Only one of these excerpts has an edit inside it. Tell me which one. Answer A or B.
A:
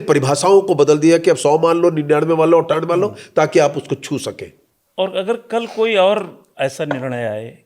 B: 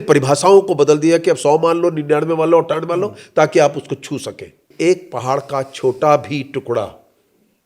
B